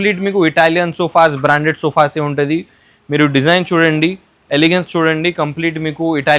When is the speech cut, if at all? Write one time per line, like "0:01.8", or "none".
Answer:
none